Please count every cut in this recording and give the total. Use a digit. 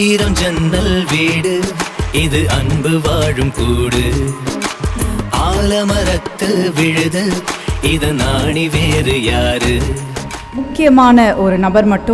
1